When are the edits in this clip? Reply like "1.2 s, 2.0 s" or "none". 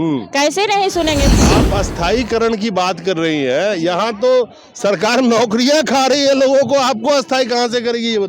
1.3 s